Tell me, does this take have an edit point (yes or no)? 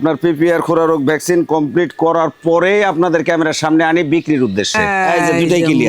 yes